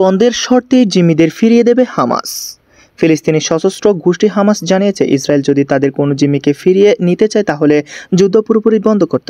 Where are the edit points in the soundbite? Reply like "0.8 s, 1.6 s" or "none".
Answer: none